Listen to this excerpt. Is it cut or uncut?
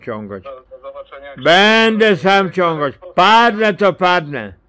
cut